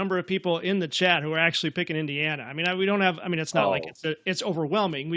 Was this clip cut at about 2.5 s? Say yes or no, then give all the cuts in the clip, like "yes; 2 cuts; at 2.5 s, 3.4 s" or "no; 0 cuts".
no; 0 cuts